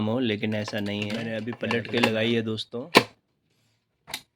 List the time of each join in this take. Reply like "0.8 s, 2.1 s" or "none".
1.2 s